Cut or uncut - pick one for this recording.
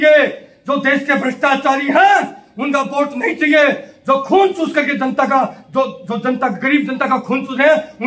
uncut